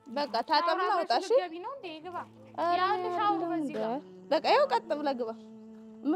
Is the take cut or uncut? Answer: uncut